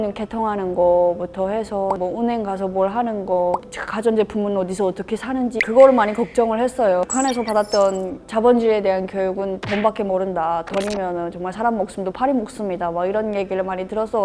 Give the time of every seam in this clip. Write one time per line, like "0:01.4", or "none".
0:02.0
0:05.6
0:07.0